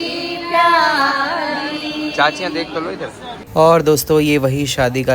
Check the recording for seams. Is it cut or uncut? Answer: cut